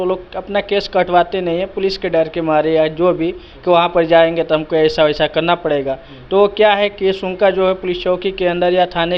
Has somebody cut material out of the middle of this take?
no; 0 cuts

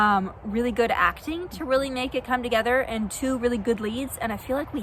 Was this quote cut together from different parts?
no; 0 cuts

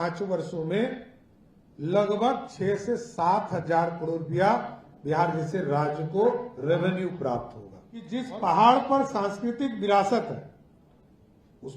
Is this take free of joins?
no; 1 cut; at 8.1 s

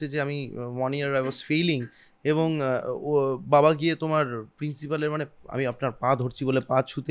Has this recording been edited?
no; 0 cuts

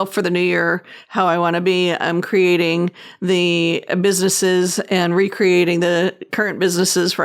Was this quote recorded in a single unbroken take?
yes; 0 cuts

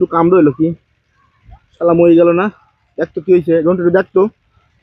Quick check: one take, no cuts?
yes; 0 cuts

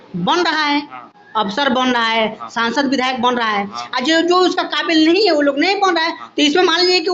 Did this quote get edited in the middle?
no; 0 cuts

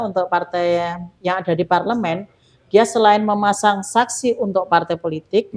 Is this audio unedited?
yes; 0 cuts

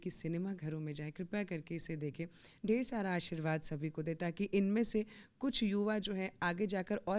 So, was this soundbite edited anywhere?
no; 0 cuts

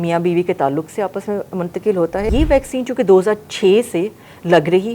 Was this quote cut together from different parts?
yes; 1 cut; at 2.3 s

